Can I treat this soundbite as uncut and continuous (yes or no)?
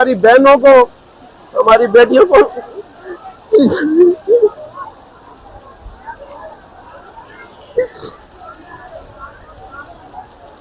yes